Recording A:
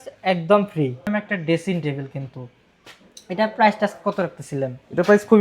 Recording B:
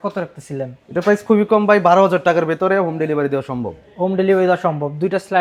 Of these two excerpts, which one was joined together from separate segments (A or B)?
A